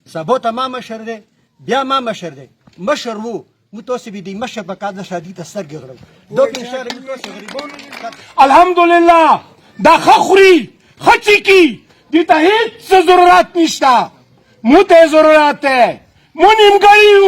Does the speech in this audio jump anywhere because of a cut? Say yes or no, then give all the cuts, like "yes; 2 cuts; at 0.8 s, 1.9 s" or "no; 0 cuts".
yes; 1 cut; at 8.0 s